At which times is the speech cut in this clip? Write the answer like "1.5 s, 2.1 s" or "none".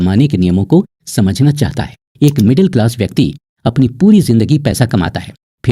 2.1 s